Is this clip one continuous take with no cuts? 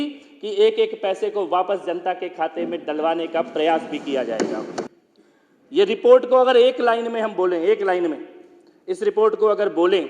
no; 1 cut; at 5.0 s

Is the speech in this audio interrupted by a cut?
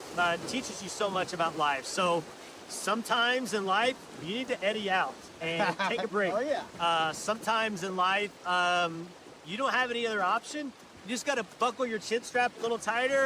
no; 0 cuts

